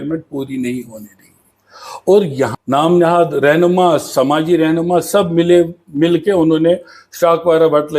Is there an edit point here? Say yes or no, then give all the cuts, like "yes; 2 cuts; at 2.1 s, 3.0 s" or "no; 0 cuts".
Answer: yes; 1 cut; at 2.5 s